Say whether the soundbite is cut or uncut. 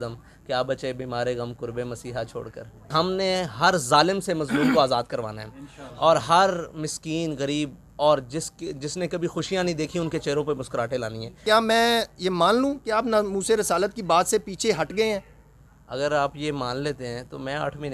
cut